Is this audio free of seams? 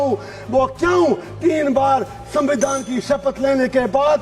yes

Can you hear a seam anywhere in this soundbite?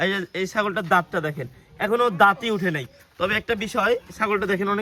no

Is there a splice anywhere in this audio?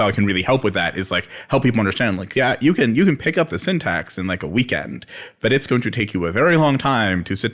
no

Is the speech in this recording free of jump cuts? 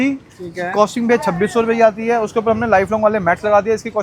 yes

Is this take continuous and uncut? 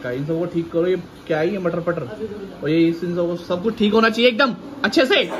yes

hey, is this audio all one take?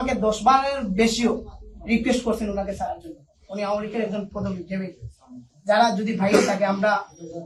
yes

